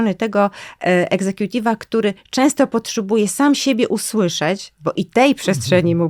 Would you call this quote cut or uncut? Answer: uncut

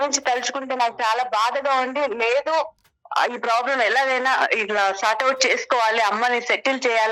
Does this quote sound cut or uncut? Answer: uncut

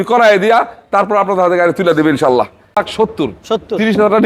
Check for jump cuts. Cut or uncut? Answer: cut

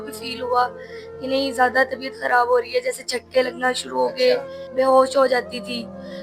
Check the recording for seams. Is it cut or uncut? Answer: cut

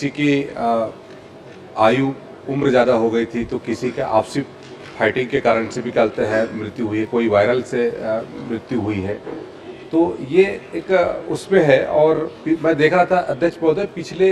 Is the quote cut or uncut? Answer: uncut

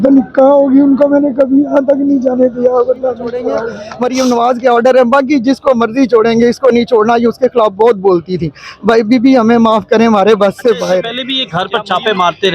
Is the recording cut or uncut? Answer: cut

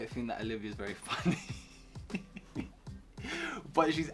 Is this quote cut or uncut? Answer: uncut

